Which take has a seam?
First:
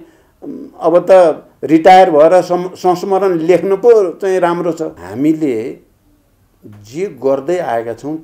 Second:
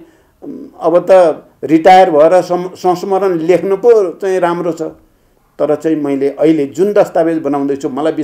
first; 1 cut; at 5.0 s

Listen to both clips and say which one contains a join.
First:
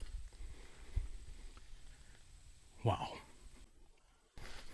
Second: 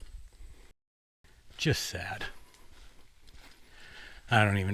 second; 2 cuts; at 1.2 s, 3.8 s

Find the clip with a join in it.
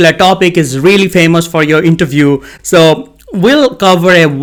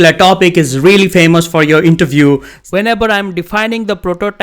second; 1 cut; at 2.5 s

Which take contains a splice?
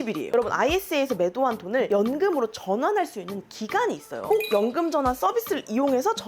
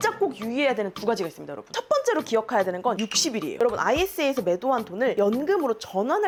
first; 1 cut; at 4.3 s

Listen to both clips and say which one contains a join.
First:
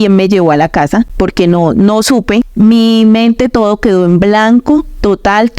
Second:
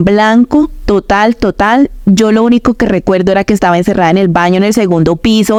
first; 2 cuts; at 1.1 s, 2.5 s

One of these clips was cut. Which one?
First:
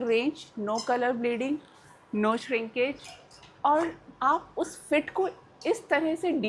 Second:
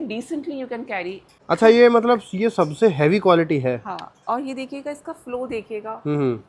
second; 1 cut; at 1.3 s

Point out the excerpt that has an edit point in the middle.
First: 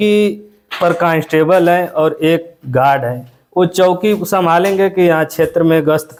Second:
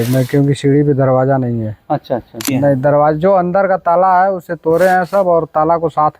second; 1 cut; at 2.4 s

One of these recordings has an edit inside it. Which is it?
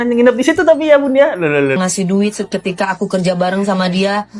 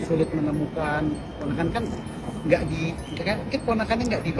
first; 1 cut; at 1.8 s

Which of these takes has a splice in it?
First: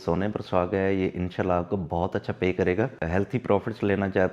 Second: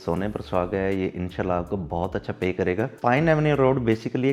first; 1 cut; at 2.9 s

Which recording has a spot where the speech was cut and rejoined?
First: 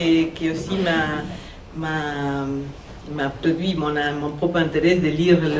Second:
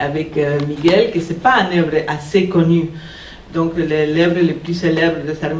second; 1 cut; at 1.3 s

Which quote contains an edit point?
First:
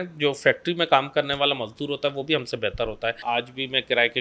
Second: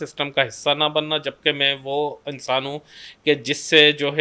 first; 1 cut; at 3.2 s

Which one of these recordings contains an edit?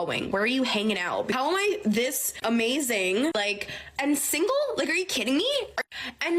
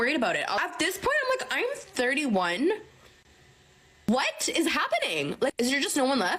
first; 1 cut; at 1.3 s

